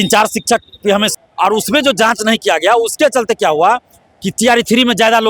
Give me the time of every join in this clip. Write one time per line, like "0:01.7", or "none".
0:01.1